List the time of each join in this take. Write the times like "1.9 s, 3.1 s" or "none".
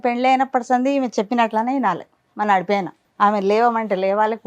3.0 s